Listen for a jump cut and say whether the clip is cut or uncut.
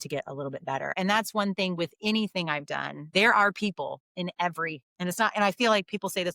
cut